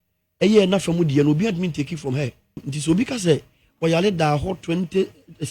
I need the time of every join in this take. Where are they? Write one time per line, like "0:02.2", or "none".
0:02.7